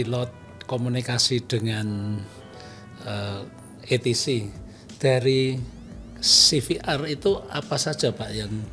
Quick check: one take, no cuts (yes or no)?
yes